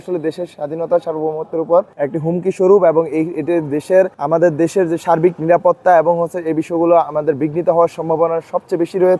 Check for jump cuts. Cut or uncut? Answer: cut